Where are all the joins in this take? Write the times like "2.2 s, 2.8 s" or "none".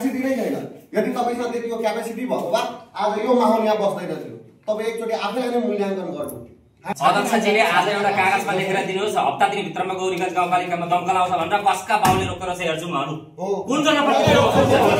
6.8 s

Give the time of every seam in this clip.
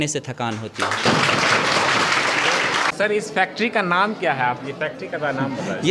2.9 s

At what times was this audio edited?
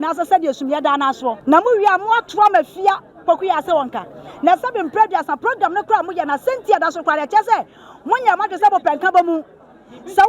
1.4 s

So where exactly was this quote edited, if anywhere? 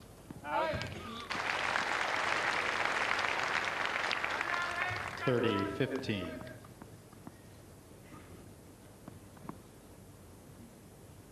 none

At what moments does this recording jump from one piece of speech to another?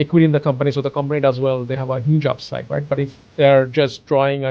3.2 s

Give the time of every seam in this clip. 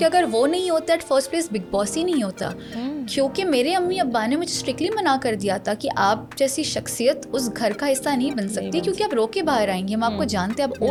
none

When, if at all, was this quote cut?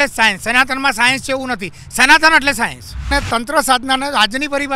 3.1 s

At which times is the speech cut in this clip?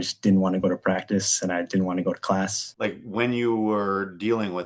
2.6 s

